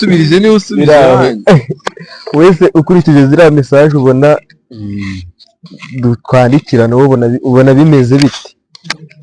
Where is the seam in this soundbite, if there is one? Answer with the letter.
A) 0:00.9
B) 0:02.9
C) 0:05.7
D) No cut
D